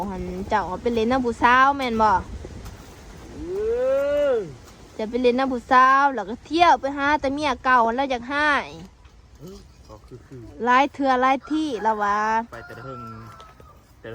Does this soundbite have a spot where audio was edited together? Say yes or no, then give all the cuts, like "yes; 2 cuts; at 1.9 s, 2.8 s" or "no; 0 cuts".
no; 0 cuts